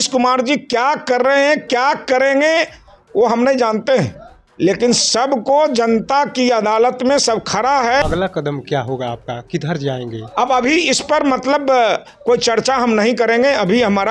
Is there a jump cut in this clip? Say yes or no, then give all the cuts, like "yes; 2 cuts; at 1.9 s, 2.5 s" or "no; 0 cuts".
yes; 1 cut; at 8.0 s